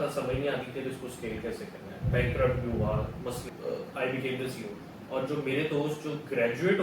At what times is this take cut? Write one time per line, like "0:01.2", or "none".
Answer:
0:03.4